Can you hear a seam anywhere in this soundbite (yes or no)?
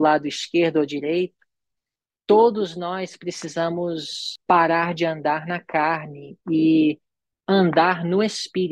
yes